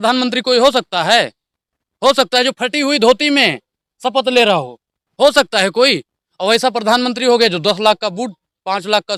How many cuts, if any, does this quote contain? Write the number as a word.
zero